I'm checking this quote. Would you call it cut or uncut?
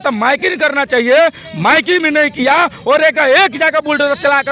uncut